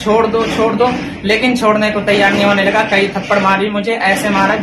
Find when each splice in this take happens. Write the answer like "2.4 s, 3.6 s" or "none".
none